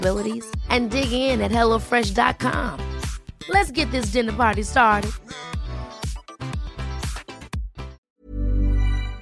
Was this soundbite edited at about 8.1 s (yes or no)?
yes